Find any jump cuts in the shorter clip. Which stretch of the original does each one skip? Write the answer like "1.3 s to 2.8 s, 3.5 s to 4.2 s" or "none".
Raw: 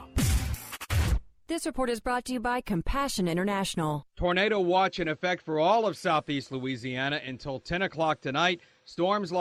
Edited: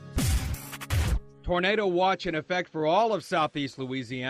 1.3 s to 4.1 s